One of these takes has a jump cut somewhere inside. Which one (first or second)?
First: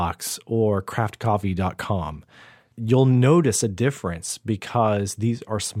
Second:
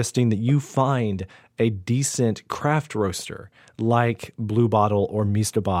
first